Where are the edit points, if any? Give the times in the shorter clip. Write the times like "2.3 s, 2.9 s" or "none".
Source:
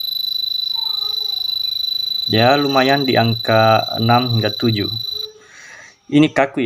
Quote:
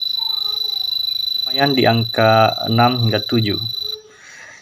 1.6 s